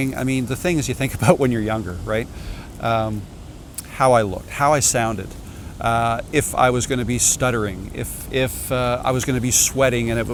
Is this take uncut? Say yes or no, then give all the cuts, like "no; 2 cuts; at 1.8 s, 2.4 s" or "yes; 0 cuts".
yes; 0 cuts